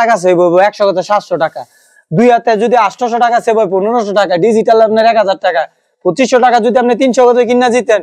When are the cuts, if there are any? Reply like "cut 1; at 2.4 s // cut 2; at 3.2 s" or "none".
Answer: none